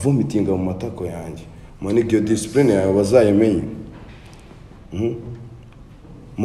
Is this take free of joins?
yes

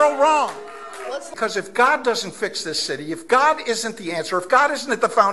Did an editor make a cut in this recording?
yes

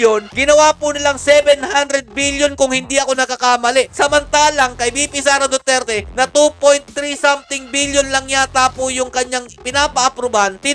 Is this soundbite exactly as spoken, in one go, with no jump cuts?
yes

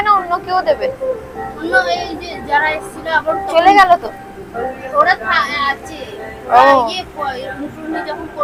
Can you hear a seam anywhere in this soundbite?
no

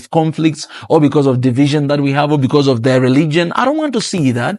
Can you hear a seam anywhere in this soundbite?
no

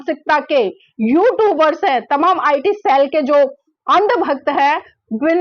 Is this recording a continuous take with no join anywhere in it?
yes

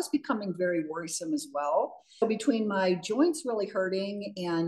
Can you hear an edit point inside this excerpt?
yes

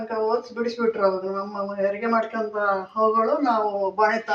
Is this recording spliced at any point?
no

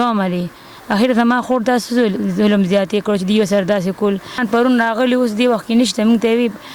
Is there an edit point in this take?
yes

